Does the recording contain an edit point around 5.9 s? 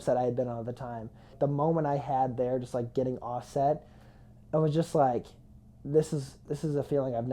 no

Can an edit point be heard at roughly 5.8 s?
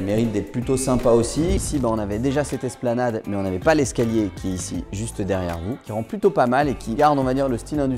yes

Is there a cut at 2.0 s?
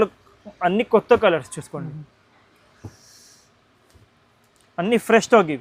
no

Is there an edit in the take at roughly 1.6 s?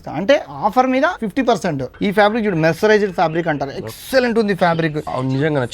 yes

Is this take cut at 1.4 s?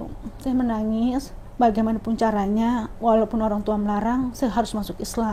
yes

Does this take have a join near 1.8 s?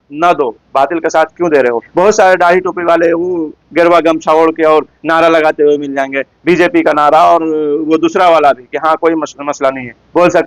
yes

